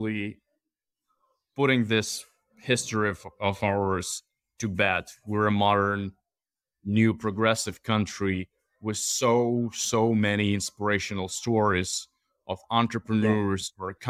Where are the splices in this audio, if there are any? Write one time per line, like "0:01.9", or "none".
none